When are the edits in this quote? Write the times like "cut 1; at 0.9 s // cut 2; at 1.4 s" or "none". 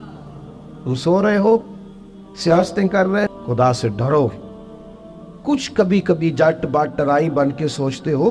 cut 1; at 3.3 s